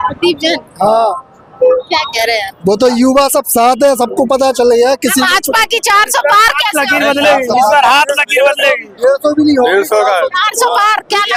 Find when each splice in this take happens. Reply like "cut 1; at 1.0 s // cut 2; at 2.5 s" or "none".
none